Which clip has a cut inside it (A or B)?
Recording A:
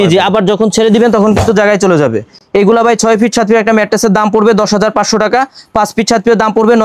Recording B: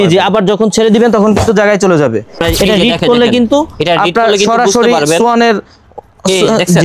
B